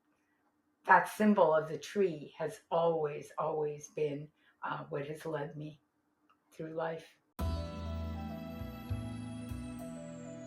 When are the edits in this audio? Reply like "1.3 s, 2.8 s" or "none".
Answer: 7.2 s